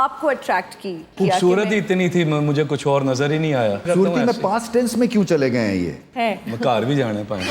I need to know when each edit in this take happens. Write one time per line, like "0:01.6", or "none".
0:01.1
0:03.8
0:06.0